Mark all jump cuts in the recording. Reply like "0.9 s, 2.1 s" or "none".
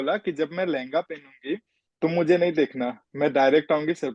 1.8 s